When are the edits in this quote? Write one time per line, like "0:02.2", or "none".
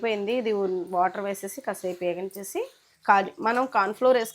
0:02.8